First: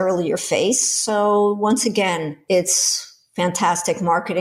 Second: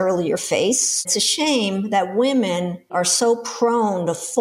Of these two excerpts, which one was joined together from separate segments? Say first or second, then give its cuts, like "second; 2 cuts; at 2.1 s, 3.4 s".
second; 2 cuts; at 1.1 s, 2.9 s